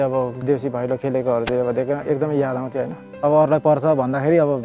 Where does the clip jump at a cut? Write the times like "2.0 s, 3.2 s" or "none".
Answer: 3.0 s